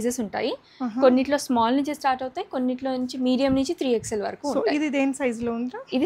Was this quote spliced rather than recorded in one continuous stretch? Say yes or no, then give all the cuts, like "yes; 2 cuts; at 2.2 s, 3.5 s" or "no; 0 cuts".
no; 0 cuts